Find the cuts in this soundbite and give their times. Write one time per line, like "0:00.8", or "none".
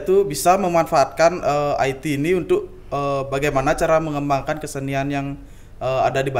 none